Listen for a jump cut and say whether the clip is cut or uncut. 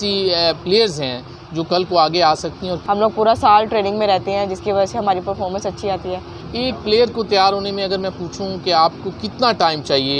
cut